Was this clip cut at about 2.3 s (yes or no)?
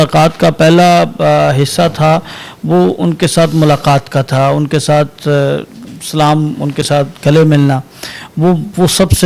no